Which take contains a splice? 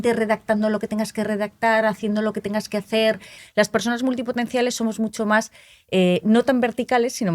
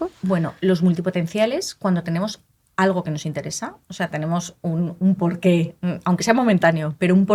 first; 1 cut; at 3.3 s

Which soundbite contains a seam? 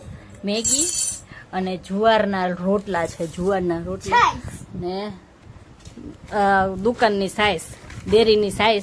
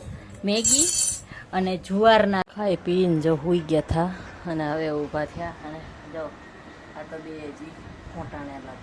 second; 1 cut; at 2.4 s

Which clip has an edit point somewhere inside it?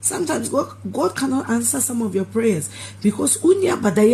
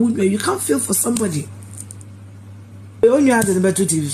second; 1 cut; at 3.0 s

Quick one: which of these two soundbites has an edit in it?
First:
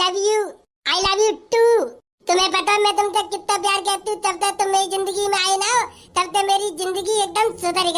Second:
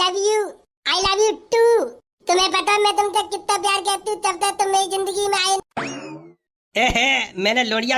second; 1 cut; at 5.6 s

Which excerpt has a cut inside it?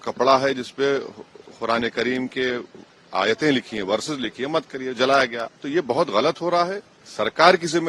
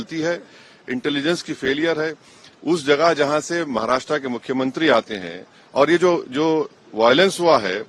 first; 1 cut; at 5.4 s

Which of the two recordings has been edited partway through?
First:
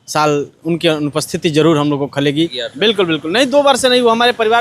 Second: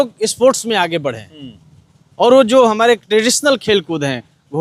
first; 1 cut; at 2.6 s

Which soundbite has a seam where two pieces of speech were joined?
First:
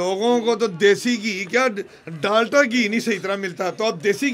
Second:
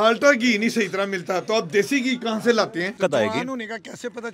second; 1 cut; at 2.9 s

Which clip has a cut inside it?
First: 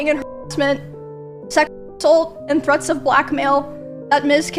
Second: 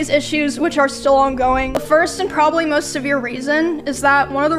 second; 1 cut; at 1.8 s

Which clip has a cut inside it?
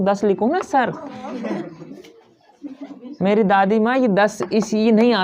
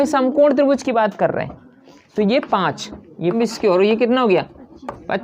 second; 1 cut; at 3.3 s

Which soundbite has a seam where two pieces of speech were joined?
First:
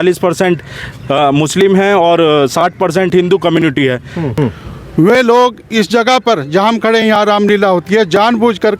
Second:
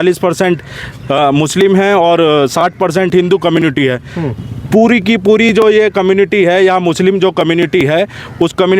first; 1 cut; at 4.3 s

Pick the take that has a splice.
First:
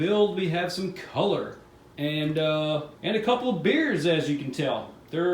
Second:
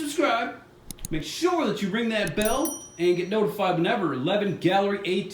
first; 1 cut; at 2.9 s

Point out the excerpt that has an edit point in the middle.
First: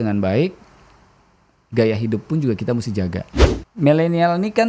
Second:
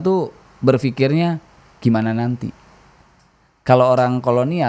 first; 1 cut; at 3.3 s

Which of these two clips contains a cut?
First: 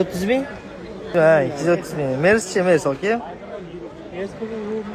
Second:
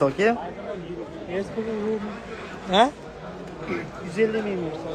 first; 1 cut; at 1.1 s

